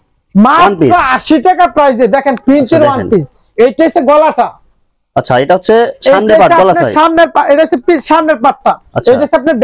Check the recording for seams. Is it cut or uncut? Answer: uncut